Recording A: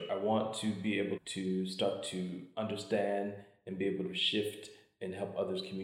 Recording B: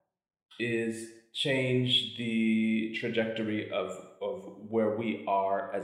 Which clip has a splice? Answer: A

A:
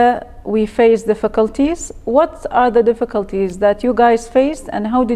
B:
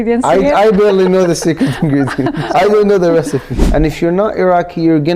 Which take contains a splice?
B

